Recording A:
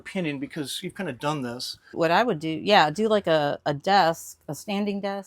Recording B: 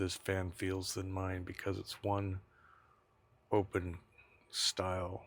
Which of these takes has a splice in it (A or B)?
A